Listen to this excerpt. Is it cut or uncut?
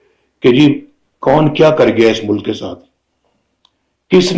uncut